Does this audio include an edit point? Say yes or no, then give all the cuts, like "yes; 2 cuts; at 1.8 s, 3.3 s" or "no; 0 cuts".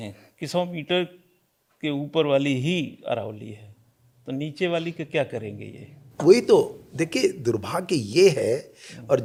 no; 0 cuts